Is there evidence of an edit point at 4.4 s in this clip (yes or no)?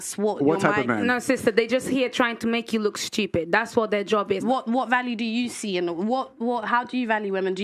yes